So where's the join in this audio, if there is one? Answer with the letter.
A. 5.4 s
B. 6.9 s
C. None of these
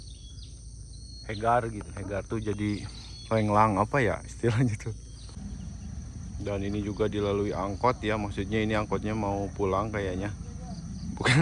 A